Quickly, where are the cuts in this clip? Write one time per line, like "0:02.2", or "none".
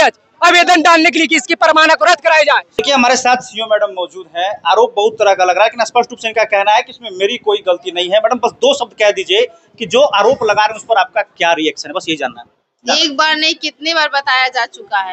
0:02.7